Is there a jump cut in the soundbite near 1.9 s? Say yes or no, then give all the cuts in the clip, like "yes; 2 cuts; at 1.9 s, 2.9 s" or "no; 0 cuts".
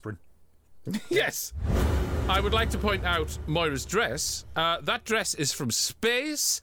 yes; 1 cut; at 1.9 s